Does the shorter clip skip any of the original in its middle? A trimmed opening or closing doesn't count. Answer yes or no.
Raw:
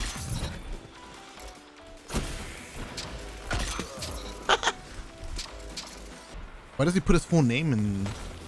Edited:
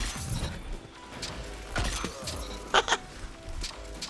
yes